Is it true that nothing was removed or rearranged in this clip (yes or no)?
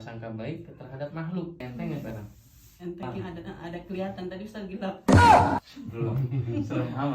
no